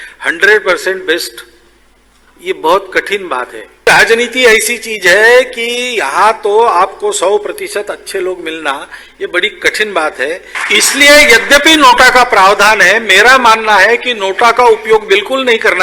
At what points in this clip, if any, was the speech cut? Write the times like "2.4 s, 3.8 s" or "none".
3.8 s, 10.5 s